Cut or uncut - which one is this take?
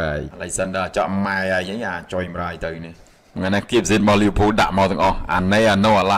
cut